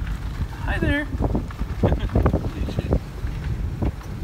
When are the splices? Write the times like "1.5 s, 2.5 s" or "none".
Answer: none